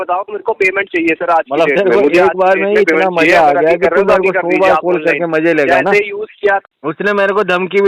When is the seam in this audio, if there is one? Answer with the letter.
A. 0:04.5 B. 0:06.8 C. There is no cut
B